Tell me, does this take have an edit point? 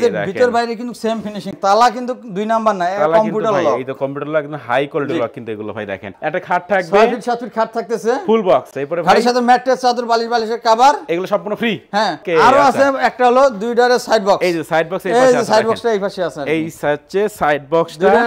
yes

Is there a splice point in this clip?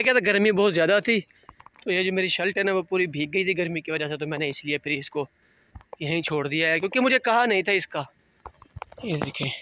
no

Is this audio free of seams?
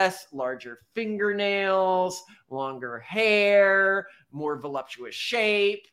yes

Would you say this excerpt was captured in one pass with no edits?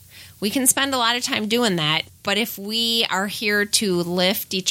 no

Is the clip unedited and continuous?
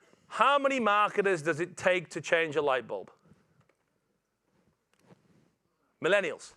no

